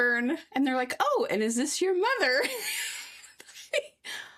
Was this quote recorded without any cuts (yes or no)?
yes